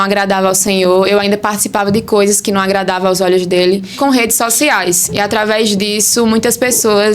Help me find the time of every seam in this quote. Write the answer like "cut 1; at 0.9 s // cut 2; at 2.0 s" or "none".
cut 1; at 3.9 s